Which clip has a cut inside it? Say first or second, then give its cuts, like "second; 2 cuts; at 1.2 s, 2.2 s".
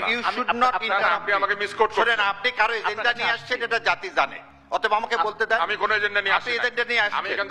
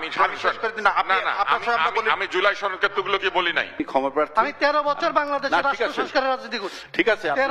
second; 1 cut; at 3.9 s